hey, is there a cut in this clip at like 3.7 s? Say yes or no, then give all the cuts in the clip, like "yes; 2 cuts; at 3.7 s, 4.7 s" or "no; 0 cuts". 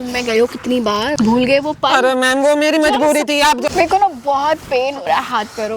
yes; 2 cuts; at 1.1 s, 3.7 s